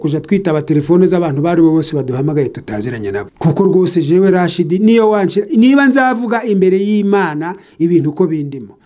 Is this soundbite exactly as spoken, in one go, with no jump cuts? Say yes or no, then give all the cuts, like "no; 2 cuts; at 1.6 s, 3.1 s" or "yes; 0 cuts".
no; 1 cut; at 3.3 s